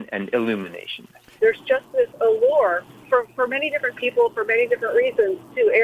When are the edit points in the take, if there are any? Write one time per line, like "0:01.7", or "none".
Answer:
0:01.3
0:02.9